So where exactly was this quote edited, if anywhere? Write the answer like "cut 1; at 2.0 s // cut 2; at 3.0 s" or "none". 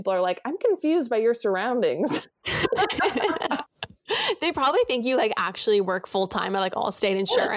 none